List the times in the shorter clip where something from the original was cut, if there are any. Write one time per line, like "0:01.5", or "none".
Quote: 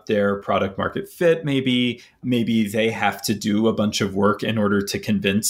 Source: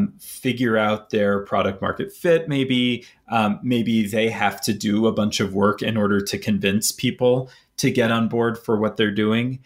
0:02.2